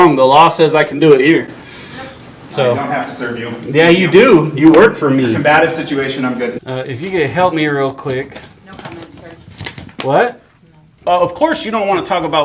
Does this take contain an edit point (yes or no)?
yes